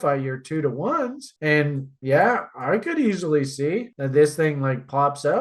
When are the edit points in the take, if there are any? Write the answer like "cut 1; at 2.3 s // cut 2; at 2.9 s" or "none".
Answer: none

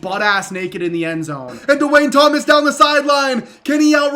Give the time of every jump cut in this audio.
cut 1; at 1.5 s

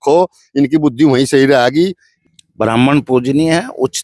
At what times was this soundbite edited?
cut 1; at 1.9 s

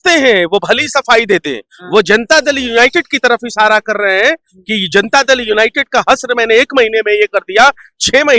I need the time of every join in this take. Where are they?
none

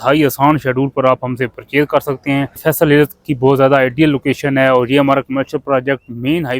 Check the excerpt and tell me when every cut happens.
cut 1; at 2.6 s

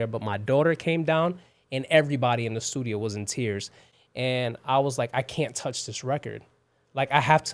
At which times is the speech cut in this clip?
none

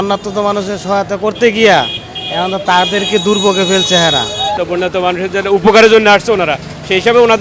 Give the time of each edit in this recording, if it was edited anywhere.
cut 1; at 4.6 s

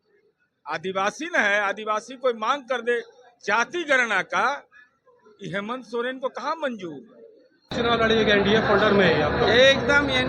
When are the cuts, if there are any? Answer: cut 1; at 7.7 s

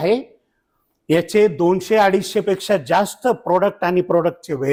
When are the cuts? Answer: none

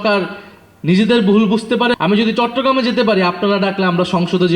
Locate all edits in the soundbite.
cut 1; at 1.9 s

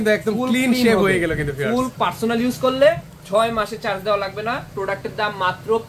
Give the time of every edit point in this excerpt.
cut 1; at 1.9 s

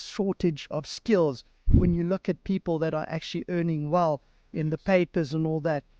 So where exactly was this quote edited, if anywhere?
cut 1; at 1.7 s

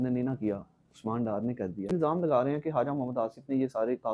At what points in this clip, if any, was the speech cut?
cut 1; at 1.9 s

